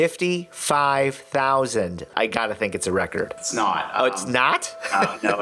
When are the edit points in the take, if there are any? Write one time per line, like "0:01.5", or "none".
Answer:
0:02.1
0:03.4